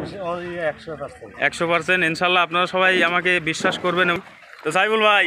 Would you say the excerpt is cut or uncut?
cut